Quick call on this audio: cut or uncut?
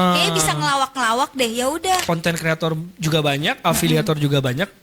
cut